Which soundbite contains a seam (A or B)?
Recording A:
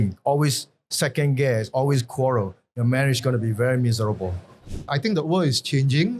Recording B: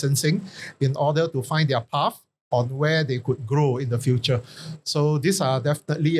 A